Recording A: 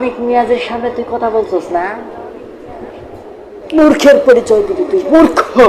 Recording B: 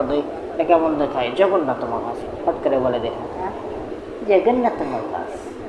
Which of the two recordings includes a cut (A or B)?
A